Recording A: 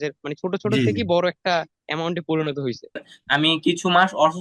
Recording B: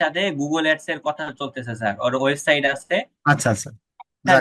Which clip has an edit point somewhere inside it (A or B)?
A